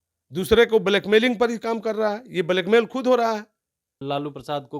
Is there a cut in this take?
yes; 1 cut; at 3.9 s

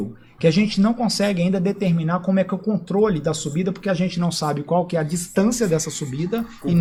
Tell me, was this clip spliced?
no; 0 cuts

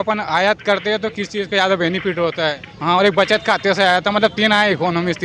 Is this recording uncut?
no; 1 cut; at 2.7 s

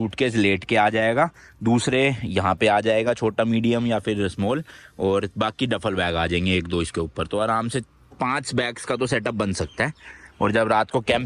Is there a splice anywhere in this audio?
no; 0 cuts

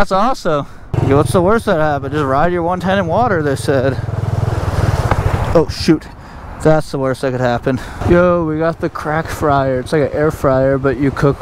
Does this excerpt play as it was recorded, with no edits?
no; 2 cuts; at 0.9 s, 7.9 s

